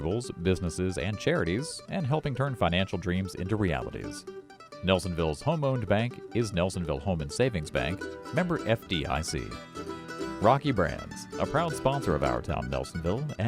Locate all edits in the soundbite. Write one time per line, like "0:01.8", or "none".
0:09.7